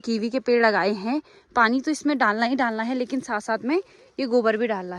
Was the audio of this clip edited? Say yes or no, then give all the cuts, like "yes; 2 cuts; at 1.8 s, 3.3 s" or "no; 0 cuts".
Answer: no; 0 cuts